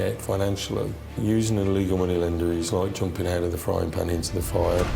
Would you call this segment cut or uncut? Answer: cut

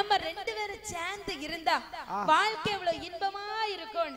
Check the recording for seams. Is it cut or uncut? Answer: uncut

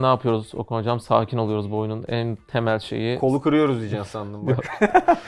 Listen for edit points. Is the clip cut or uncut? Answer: uncut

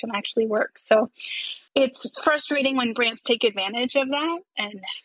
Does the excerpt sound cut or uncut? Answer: uncut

